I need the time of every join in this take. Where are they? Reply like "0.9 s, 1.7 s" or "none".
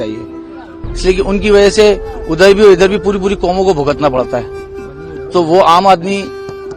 none

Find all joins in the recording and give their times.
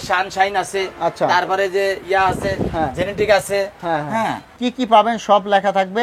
4.5 s

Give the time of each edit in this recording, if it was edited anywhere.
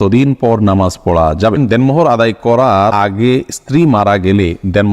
1.6 s, 2.9 s

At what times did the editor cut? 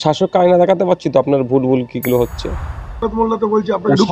3.0 s

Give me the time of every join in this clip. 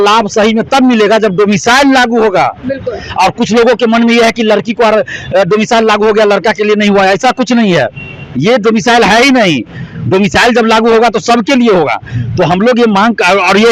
none

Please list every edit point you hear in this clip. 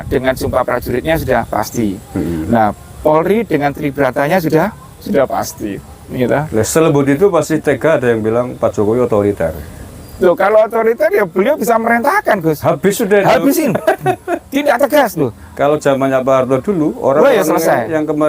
none

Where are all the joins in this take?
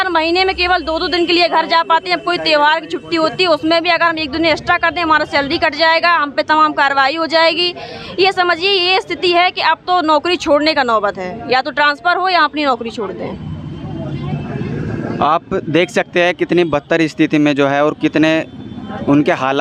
none

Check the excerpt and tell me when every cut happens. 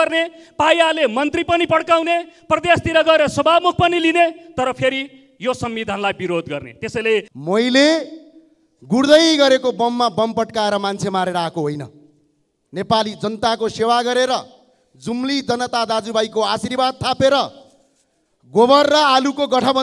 7.3 s

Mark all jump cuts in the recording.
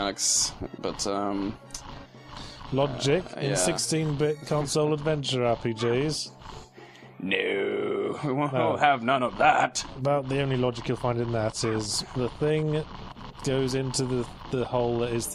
11.6 s

